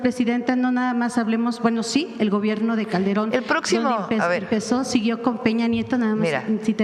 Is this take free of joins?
yes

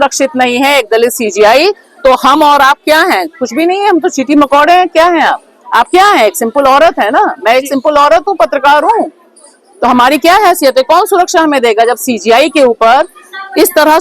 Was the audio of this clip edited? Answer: no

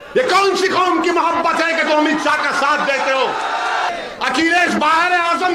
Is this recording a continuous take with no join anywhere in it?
no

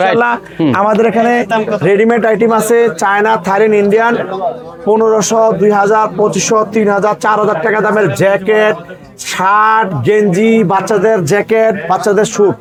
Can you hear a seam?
no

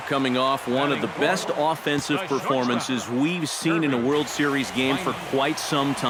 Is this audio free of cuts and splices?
yes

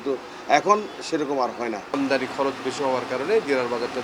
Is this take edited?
yes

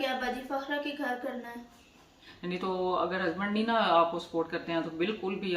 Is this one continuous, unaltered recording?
no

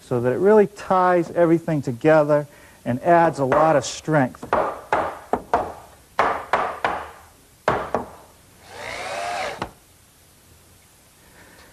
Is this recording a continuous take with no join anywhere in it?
no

